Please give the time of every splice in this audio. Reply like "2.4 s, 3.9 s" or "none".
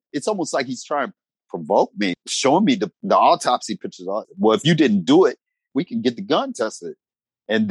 1.3 s, 2.1 s, 2.9 s, 4.2 s, 5.7 s